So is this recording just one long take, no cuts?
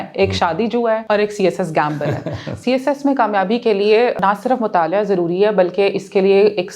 no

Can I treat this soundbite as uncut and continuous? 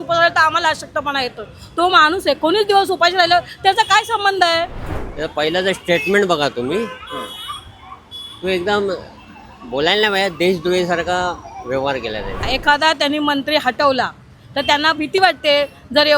no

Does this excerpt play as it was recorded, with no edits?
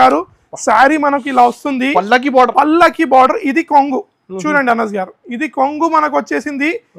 yes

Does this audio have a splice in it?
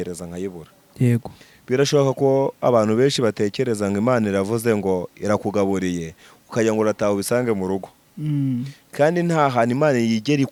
no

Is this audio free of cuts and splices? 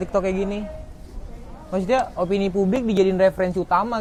yes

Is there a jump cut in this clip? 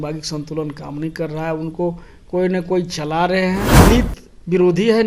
yes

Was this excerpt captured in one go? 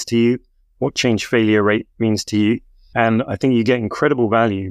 no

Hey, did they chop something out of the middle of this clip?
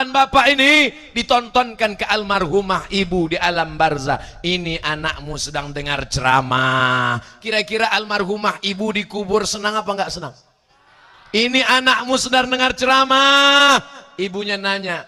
no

